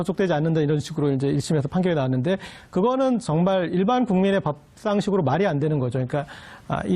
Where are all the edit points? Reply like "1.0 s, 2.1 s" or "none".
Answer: 5.1 s